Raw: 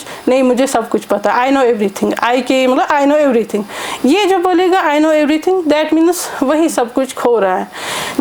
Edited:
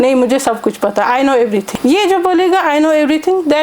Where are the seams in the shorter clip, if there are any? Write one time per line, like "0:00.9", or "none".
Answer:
0:01.7